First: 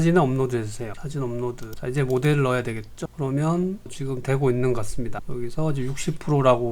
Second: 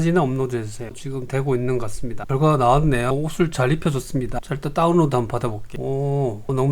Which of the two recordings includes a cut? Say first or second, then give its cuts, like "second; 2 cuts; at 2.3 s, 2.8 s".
second; 3 cuts; at 1.0 s, 2.1 s, 5.7 s